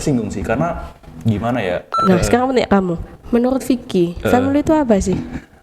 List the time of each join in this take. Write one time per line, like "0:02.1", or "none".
0:02.0